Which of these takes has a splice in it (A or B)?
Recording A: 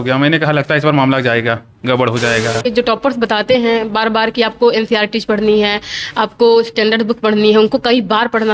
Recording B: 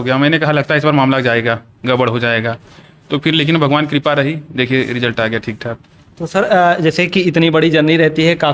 A